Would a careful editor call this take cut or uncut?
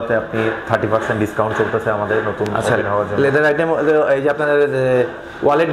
uncut